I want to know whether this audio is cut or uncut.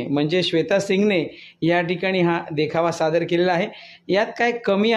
uncut